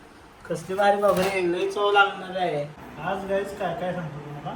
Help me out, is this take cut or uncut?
cut